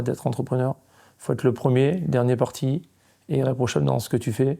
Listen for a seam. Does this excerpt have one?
no; 0 cuts

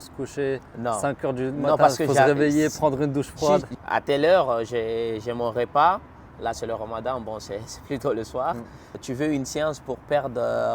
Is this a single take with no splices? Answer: no; 2 cuts; at 3.7 s, 9.0 s

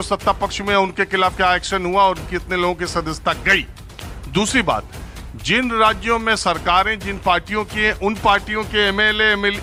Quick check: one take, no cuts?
yes; 0 cuts

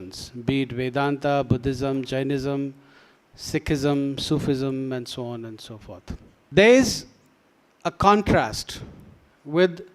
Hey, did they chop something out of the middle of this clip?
yes; 1 cut; at 6.3 s

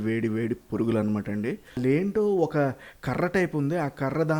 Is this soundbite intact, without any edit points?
no; 1 cut; at 1.8 s

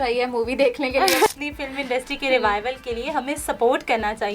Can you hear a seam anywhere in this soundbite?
yes; 1 cut; at 1.3 s

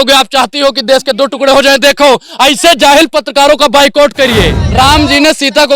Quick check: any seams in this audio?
yes; 1 cut; at 4.6 s

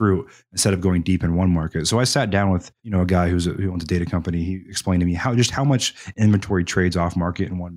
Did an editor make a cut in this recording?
yes; 1 cut; at 2.8 s

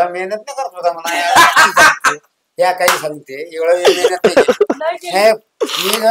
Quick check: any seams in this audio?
no; 0 cuts

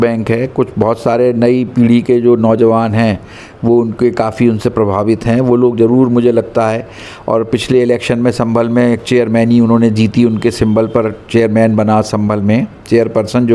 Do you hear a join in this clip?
no; 0 cuts

